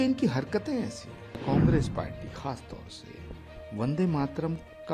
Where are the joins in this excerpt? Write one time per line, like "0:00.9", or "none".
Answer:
0:01.4